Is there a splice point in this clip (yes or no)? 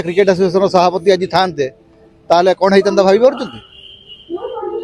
no